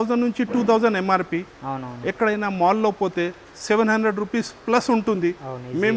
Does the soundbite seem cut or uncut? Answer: uncut